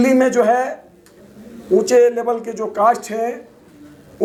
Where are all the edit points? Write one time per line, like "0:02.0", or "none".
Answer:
none